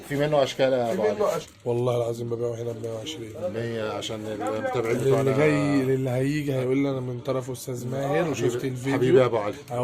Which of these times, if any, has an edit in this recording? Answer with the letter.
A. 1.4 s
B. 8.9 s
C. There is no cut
A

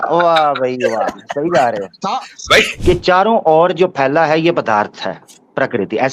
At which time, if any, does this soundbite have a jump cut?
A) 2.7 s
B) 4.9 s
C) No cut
A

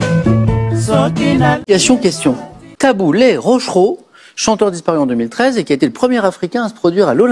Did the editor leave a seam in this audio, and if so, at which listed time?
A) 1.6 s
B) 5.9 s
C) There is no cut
A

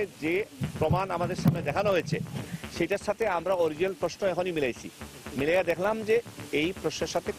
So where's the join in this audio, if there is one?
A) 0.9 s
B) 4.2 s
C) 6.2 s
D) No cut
D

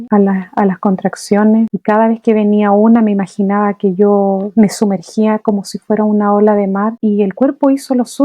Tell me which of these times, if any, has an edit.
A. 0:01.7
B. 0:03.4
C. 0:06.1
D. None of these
A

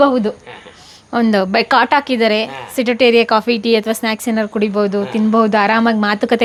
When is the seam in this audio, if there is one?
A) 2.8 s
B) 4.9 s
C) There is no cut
C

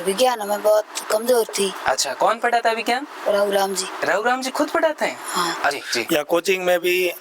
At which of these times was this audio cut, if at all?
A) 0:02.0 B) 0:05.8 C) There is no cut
B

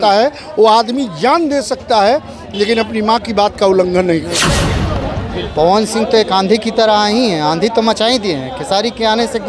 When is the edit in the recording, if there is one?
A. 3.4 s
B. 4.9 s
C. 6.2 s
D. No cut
B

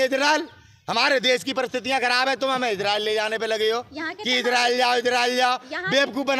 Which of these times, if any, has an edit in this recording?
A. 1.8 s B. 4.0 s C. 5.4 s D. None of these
D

